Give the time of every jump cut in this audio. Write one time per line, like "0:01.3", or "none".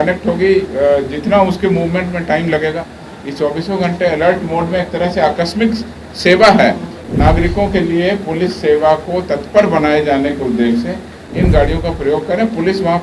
none